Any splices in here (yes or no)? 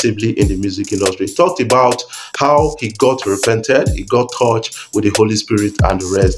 no